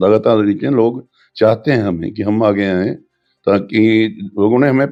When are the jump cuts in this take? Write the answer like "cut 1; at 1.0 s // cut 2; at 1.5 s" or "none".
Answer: none

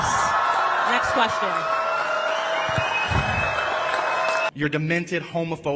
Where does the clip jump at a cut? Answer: cut 1; at 4.5 s

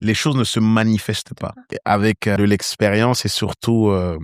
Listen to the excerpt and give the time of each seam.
none

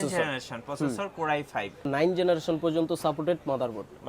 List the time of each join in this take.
cut 1; at 1.9 s

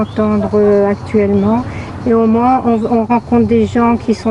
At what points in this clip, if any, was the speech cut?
none

